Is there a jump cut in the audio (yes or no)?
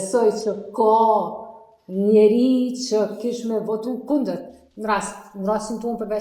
no